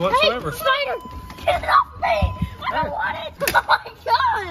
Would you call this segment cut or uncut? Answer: cut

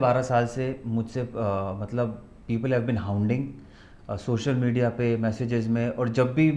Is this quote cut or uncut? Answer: uncut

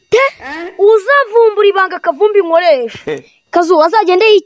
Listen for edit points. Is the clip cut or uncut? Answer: uncut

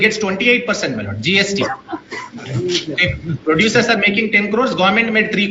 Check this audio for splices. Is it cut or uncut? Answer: uncut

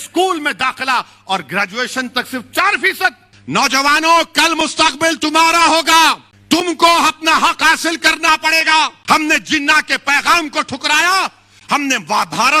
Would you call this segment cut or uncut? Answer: cut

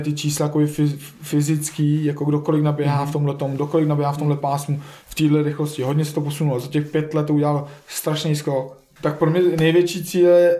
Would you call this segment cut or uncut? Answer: cut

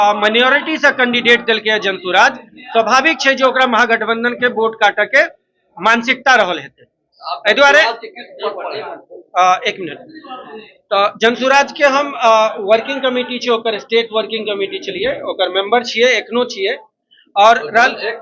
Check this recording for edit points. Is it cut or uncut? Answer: uncut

